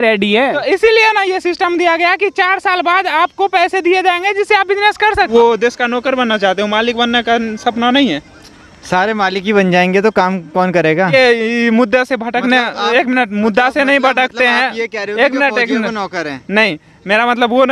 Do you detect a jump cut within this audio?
yes; 2 cuts; at 5.3 s, 11.1 s

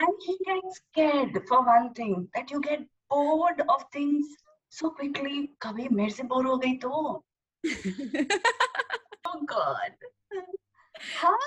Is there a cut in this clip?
yes; 1 cut; at 9.3 s

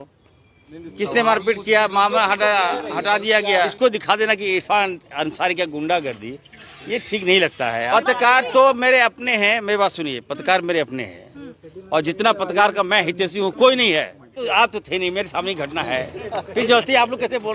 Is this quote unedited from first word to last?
no; 3 cuts; at 3.7 s, 7.9 s, 14.4 s

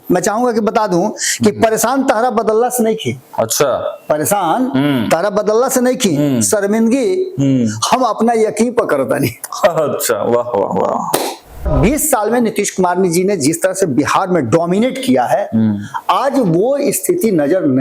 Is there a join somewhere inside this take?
yes; 1 cut; at 11.7 s

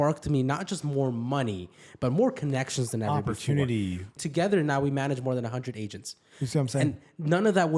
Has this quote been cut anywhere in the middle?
yes; 1 cut; at 4.1 s

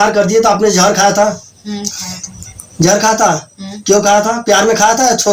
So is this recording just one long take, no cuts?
yes; 0 cuts

